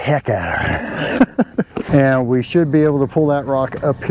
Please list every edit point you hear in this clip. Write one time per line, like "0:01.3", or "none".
0:01.8